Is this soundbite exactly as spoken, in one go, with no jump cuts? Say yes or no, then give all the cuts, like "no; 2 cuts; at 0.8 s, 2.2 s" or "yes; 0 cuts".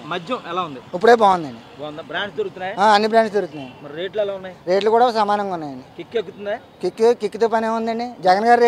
yes; 0 cuts